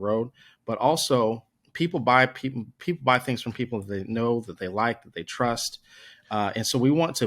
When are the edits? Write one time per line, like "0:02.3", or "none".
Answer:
none